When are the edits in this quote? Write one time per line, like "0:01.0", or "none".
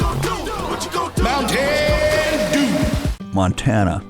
0:03.2